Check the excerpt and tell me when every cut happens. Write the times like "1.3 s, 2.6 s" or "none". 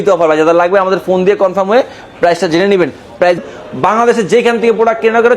3.4 s